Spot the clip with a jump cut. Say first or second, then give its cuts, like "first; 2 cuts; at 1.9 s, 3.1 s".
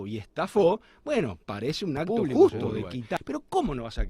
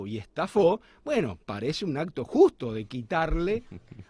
first; 1 cut; at 3.2 s